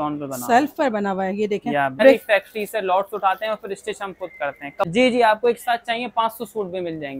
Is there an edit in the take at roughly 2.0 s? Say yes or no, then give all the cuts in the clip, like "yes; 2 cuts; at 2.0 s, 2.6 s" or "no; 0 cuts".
yes; 2 cuts; at 2.0 s, 4.9 s